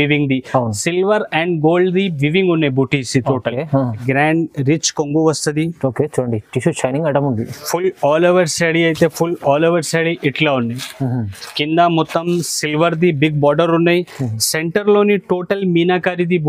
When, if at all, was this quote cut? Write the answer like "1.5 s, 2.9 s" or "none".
4.0 s